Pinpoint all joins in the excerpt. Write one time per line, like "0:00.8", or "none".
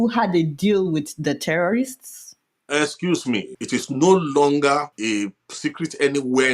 0:03.5
0:04.9